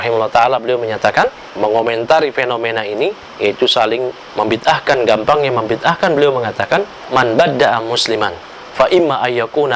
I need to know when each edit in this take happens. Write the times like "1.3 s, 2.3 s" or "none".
1.4 s, 4.2 s, 7.0 s